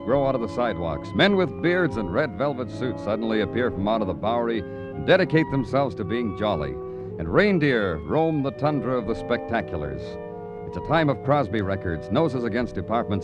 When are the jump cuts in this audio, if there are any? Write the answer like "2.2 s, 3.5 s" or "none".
none